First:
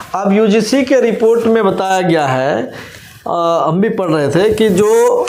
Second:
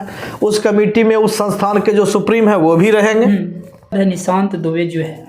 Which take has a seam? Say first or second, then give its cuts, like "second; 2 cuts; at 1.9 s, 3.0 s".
second; 1 cut; at 3.9 s